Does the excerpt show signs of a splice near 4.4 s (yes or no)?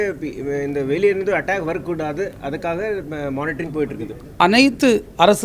yes